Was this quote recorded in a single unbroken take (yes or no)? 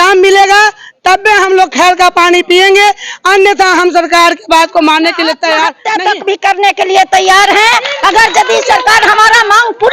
no